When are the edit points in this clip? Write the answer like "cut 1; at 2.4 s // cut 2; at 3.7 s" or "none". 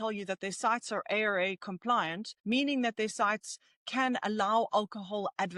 cut 1; at 2.3 s